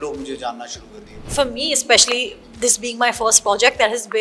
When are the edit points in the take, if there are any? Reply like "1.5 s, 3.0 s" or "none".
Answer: 1.3 s